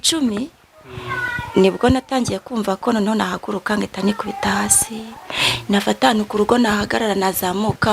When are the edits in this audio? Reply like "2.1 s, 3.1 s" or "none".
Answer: none

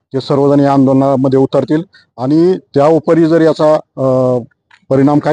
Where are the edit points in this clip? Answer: none

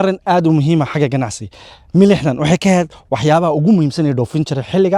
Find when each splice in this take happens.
none

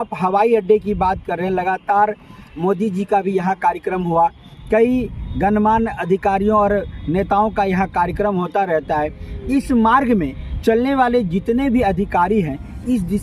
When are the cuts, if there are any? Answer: none

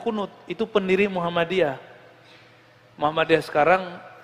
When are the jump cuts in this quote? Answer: none

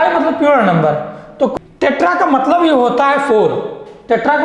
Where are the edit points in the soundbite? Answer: 1.5 s

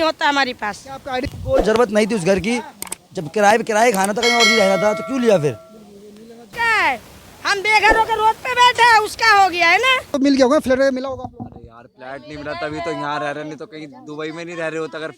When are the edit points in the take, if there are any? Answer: 1.2 s, 6.5 s, 10.1 s

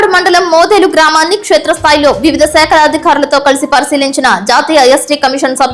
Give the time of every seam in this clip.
none

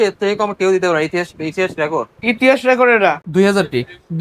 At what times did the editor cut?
3.2 s

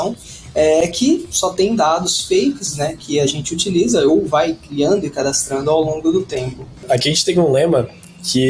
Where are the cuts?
6.8 s

